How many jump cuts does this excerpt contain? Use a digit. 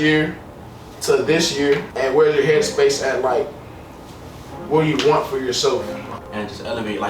2